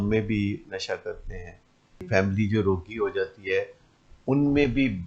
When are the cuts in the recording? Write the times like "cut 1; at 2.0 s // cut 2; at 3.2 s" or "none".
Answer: cut 1; at 2.0 s